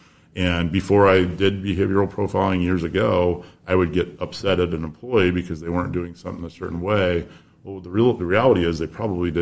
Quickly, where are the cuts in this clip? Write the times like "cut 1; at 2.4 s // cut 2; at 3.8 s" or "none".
none